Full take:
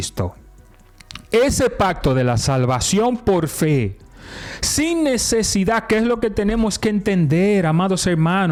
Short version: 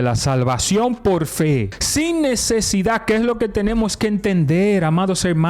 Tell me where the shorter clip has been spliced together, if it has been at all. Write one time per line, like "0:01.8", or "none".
0:01.8